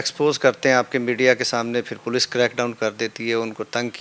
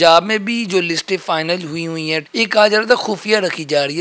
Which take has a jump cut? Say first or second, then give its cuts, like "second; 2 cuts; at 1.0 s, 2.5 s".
second; 1 cut; at 2.3 s